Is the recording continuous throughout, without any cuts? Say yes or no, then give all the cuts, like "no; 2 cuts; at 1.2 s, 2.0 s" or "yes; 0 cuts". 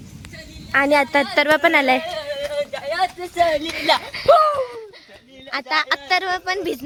yes; 0 cuts